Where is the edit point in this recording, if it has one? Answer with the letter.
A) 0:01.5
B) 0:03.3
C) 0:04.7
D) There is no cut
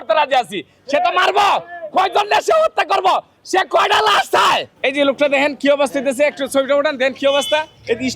C